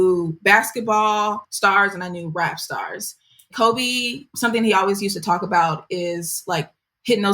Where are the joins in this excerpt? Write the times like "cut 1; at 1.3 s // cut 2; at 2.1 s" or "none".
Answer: cut 1; at 1.5 s